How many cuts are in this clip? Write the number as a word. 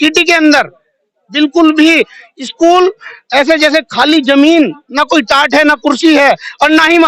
zero